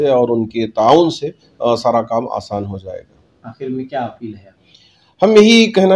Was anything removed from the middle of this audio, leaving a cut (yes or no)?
no